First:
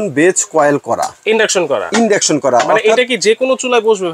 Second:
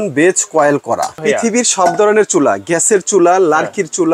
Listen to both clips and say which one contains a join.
second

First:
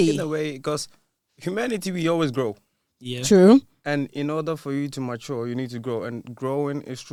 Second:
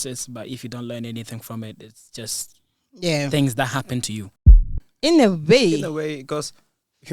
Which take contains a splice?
second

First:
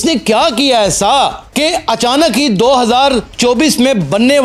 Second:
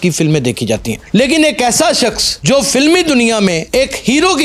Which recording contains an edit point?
second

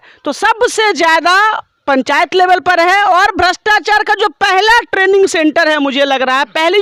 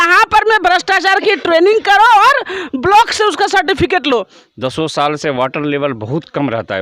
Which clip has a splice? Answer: second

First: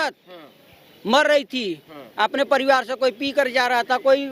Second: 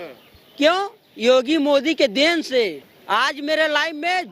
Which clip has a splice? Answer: second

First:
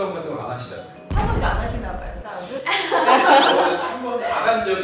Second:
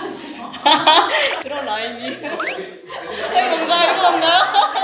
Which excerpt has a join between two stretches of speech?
first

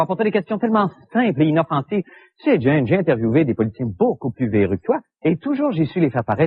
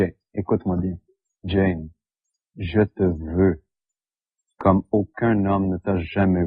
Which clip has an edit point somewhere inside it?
second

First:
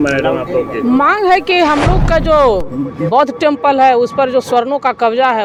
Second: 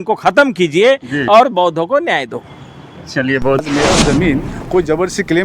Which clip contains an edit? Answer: second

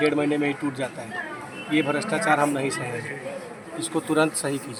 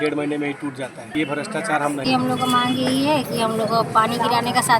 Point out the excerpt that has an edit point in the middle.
second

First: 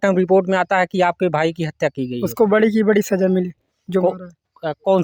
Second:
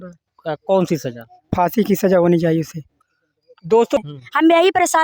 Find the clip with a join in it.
second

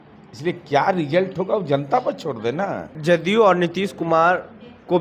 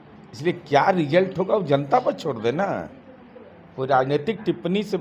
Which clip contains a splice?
first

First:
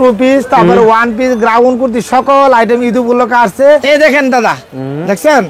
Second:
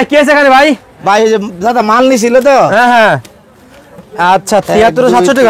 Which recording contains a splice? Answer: first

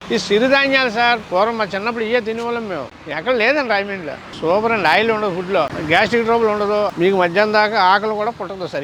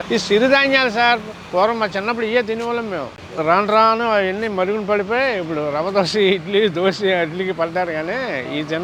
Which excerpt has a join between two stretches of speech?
first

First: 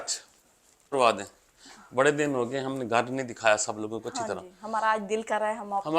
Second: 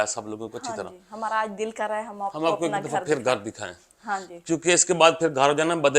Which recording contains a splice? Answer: first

